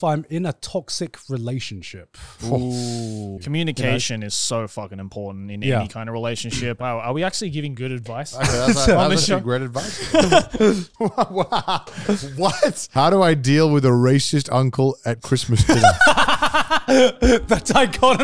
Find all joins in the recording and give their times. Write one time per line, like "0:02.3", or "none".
0:03.3
0:06.8
0:10.9
0:12.8